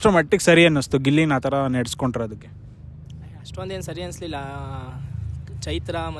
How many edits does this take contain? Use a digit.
0